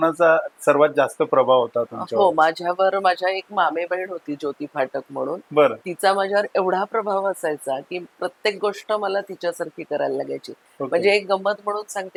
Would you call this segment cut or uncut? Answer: uncut